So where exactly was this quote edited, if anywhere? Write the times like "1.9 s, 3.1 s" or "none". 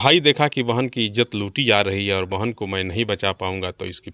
none